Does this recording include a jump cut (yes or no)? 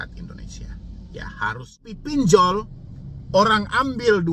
yes